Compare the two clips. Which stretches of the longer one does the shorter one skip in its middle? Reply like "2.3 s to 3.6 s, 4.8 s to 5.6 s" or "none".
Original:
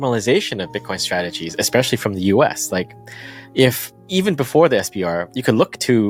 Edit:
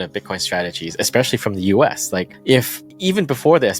2.9 s to 3.4 s